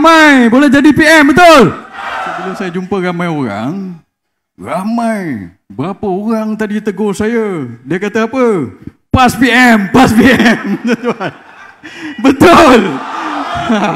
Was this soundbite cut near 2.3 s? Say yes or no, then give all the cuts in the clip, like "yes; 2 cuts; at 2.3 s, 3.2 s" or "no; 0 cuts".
yes; 1 cut; at 2.3 s